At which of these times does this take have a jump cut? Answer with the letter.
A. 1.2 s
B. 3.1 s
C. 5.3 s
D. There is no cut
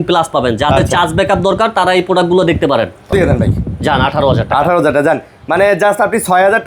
B